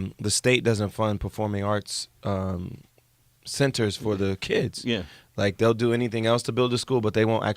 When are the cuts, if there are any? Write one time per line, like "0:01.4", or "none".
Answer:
0:04.9